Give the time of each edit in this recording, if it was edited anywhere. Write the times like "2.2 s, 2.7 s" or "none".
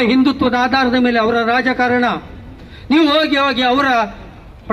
none